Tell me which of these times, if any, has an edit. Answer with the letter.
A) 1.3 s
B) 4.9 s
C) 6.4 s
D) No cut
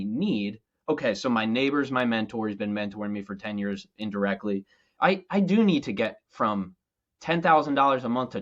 B